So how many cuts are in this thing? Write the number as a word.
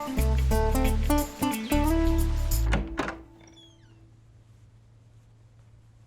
one